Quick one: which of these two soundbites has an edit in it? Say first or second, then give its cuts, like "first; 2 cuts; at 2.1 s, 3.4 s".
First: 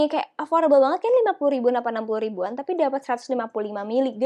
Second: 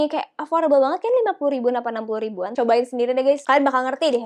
second; 1 cut; at 2.5 s